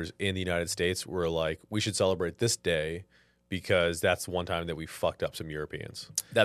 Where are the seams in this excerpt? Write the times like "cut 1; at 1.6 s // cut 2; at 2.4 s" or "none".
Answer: none